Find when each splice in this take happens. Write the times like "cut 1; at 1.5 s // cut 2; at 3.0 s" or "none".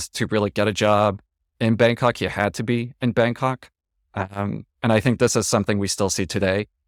none